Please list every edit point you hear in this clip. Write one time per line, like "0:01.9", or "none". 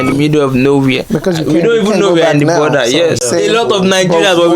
0:03.2